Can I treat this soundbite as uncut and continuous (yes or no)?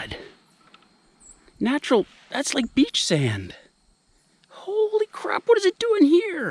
yes